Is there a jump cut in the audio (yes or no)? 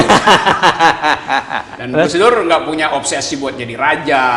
yes